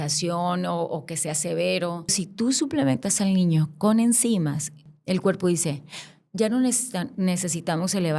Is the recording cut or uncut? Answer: cut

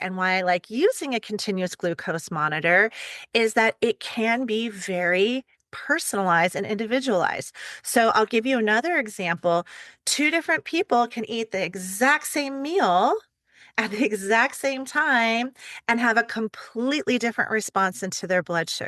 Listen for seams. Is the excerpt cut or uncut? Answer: uncut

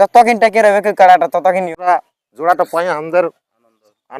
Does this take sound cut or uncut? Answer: cut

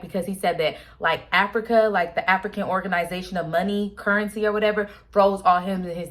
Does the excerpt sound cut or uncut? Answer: uncut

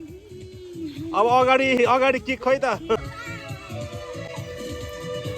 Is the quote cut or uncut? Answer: cut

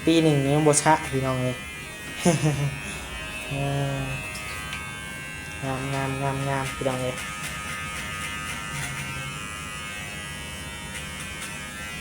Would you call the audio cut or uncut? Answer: uncut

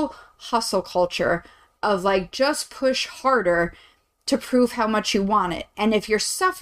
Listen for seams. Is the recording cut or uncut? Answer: uncut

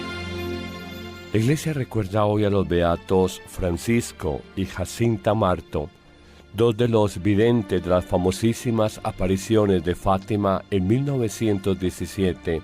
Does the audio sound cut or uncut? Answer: cut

